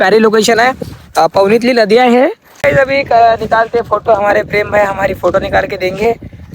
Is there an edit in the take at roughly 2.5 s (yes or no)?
yes